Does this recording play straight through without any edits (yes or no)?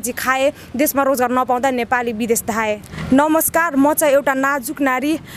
no